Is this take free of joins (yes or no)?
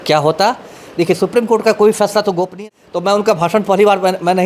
no